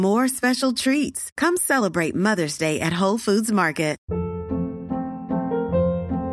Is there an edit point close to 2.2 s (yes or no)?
no